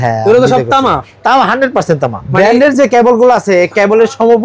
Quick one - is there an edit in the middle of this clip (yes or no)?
yes